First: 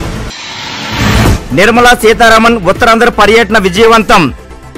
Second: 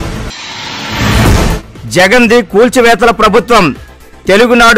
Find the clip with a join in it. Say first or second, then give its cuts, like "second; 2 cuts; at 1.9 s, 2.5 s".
first; 1 cut; at 1.3 s